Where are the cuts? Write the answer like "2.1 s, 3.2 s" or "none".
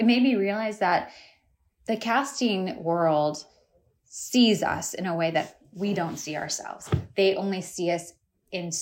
none